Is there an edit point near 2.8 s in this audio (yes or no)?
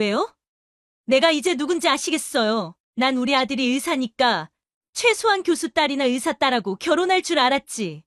yes